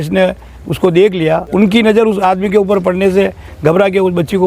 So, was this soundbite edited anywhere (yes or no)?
yes